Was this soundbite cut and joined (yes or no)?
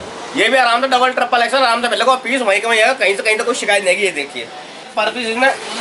yes